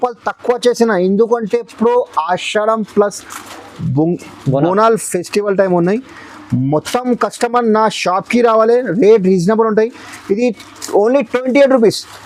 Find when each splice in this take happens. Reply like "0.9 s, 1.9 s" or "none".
none